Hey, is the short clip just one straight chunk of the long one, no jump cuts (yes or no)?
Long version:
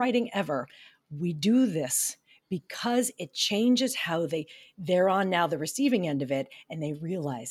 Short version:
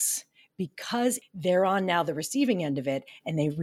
no